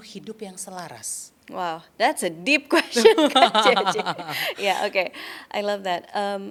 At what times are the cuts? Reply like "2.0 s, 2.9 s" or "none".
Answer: none